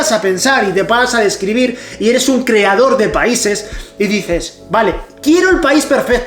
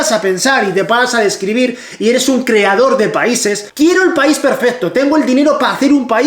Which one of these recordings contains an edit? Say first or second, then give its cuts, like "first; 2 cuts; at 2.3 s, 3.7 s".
second; 1 cut; at 3.7 s